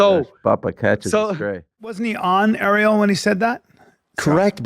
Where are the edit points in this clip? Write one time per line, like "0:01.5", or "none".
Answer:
0:02.0

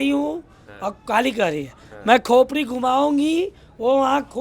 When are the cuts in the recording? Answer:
none

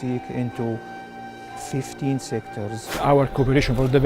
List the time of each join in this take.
0:02.9

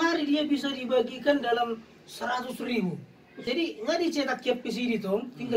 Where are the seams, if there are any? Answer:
0:03.3

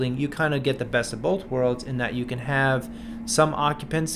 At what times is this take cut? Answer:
none

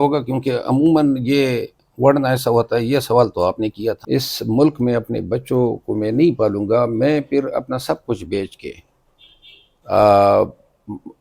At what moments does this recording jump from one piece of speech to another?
0:04.0

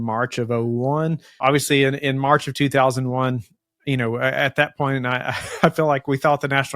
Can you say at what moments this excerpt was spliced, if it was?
0:01.3

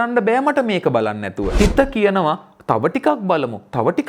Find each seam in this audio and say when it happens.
0:01.4

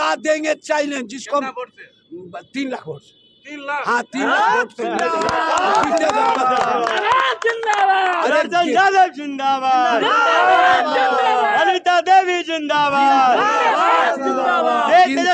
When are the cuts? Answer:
none

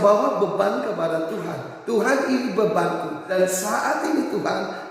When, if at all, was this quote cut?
0:03.3

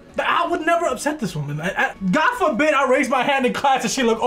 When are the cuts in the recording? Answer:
0:01.9

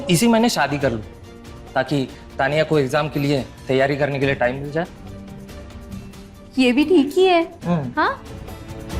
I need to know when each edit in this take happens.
none

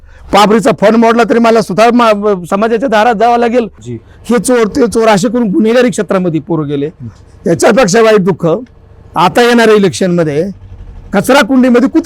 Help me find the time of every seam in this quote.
0:03.8

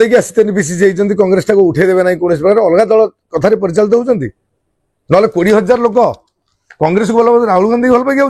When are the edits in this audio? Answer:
none

